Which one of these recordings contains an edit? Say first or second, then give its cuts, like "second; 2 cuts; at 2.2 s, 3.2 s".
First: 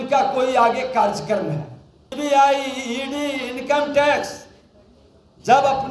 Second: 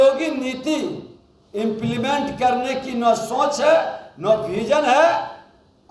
first; 1 cut; at 2.0 s